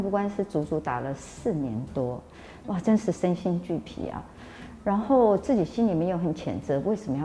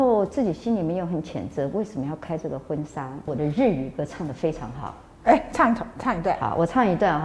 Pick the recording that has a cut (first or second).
second